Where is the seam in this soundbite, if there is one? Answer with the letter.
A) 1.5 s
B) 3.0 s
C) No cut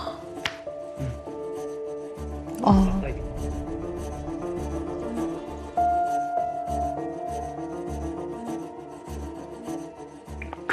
C